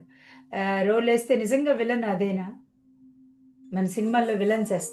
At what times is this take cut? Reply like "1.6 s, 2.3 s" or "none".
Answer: none